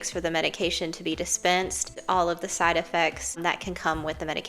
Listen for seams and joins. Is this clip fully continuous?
no; 2 cuts; at 1.9 s, 3.4 s

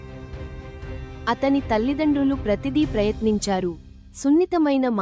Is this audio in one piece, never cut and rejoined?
no; 1 cut; at 1.2 s

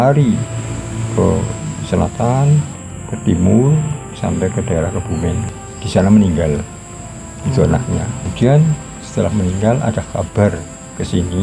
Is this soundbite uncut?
yes; 0 cuts

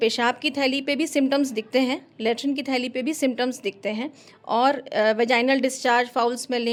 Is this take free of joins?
yes; 0 cuts

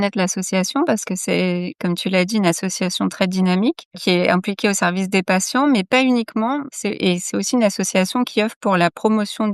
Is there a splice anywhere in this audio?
no; 0 cuts

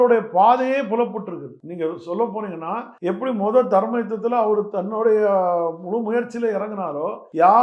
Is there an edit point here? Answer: no; 0 cuts

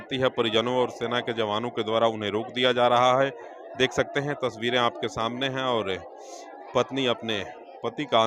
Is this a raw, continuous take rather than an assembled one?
yes; 0 cuts

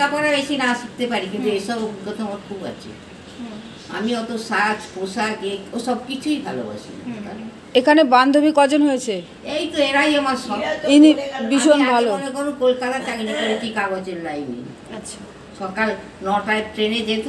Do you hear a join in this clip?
no; 0 cuts

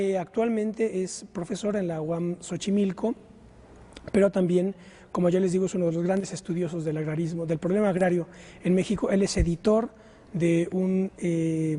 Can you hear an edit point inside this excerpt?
no; 0 cuts

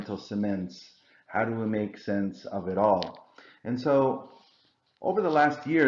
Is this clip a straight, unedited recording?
yes; 0 cuts

